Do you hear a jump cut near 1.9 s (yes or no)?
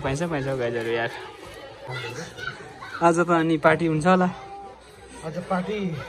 yes